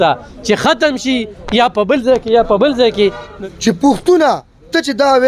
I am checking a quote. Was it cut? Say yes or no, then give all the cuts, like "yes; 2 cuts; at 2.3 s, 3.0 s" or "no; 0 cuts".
yes; 1 cut; at 3.3 s